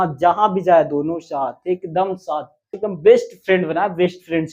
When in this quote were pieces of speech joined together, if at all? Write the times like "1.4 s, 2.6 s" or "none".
2.8 s